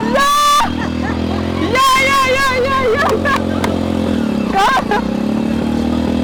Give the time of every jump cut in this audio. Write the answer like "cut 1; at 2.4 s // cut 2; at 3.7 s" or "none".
none